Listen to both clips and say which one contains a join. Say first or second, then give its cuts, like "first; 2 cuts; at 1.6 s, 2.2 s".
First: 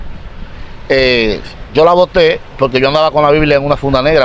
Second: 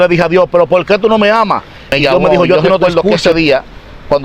second; 1 cut; at 2.9 s